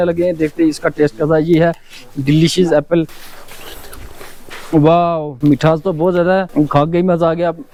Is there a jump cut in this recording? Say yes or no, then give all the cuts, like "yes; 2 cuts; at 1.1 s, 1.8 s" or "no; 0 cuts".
no; 0 cuts